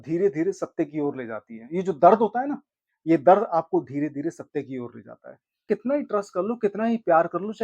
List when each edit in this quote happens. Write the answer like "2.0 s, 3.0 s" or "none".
5.6 s